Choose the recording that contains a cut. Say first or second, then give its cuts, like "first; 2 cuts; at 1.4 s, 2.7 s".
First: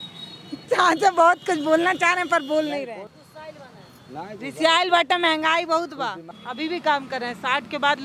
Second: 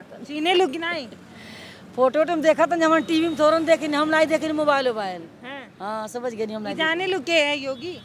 first; 2 cuts; at 3.1 s, 6.3 s